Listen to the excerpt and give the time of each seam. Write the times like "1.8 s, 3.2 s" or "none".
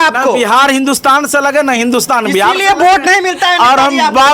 none